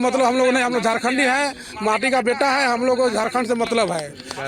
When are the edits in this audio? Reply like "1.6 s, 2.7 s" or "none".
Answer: none